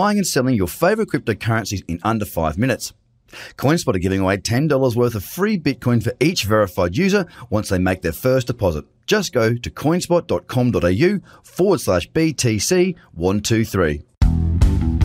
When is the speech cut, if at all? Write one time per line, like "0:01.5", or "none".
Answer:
0:14.1